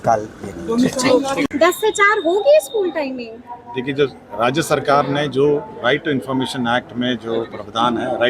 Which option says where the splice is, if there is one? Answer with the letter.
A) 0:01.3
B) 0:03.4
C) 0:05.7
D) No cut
A